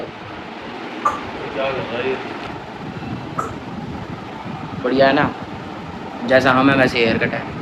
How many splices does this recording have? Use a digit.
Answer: 0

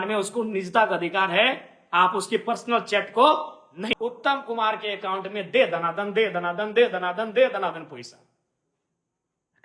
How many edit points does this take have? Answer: 1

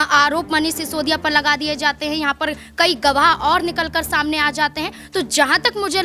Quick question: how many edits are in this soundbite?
0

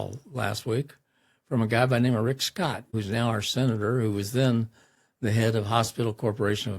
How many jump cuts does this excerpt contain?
1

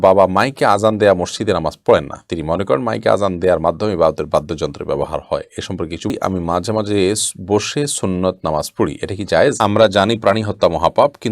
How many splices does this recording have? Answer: 2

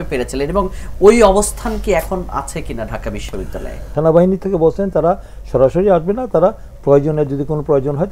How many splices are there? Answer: 1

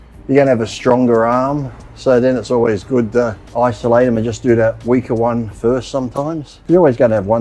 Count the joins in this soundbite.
2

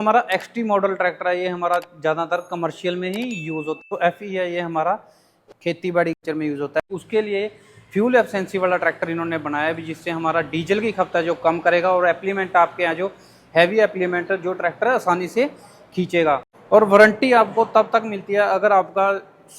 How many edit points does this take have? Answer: 3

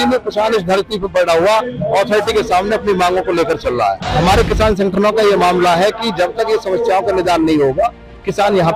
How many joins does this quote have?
1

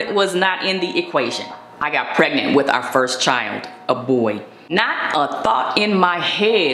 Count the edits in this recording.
1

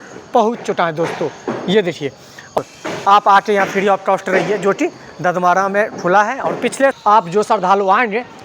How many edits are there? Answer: 2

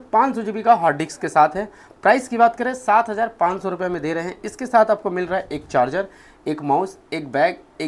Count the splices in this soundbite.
0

